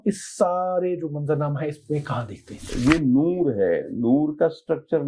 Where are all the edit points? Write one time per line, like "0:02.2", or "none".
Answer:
0:02.7